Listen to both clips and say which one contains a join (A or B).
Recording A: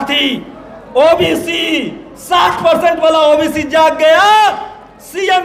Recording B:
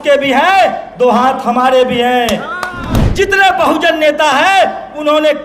B